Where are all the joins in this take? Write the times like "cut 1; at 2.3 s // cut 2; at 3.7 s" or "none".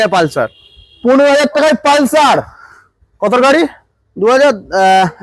none